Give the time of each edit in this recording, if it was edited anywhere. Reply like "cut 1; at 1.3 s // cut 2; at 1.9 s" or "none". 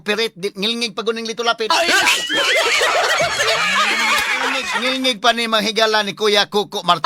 cut 1; at 4.7 s